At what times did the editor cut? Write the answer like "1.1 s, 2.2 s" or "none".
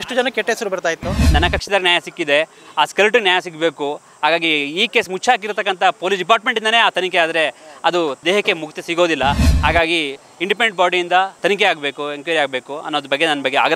1.3 s, 8.2 s, 11.4 s